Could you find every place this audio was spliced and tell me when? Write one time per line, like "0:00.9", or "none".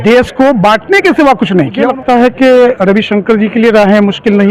0:01.8